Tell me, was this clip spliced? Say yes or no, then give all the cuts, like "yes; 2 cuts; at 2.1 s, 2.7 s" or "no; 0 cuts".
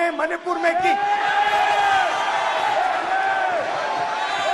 no; 0 cuts